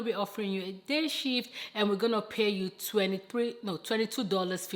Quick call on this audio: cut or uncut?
uncut